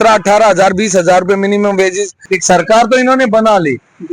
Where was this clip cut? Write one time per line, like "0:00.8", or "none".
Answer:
0:02.3